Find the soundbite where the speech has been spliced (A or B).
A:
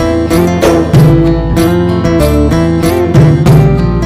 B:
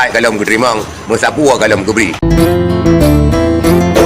B